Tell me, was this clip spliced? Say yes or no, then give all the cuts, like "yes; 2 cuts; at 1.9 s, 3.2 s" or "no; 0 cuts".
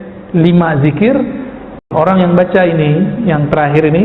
yes; 1 cut; at 1.9 s